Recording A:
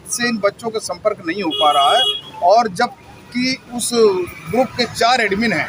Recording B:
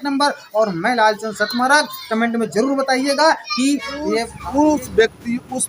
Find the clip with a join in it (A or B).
B